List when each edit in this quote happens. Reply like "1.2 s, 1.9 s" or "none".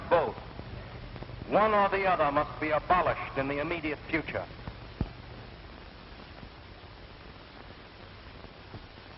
none